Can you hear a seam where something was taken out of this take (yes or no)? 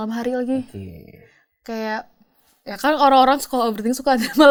no